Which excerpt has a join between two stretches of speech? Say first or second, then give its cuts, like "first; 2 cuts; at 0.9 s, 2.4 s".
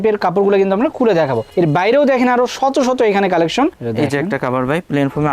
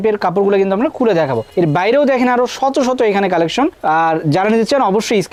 first; 1 cut; at 3.8 s